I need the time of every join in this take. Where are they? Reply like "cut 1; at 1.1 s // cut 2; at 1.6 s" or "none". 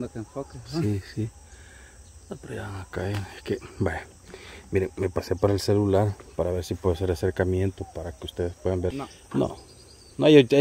cut 1; at 8.9 s